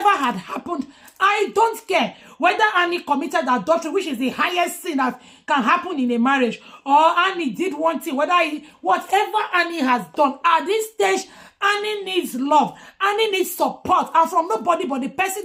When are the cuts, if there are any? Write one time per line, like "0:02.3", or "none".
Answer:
none